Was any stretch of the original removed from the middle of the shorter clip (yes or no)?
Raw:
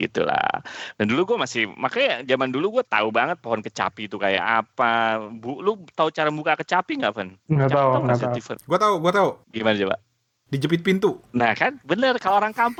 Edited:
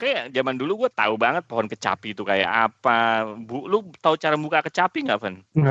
no